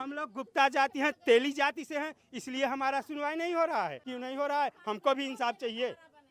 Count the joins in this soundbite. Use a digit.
1